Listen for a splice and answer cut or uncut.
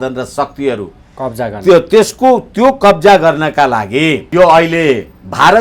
cut